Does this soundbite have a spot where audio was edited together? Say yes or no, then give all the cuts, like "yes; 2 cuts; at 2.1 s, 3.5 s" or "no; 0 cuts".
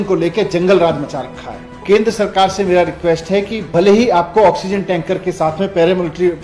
yes; 1 cut; at 1.8 s